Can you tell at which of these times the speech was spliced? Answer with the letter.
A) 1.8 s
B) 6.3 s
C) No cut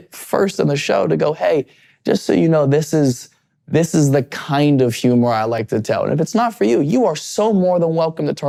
C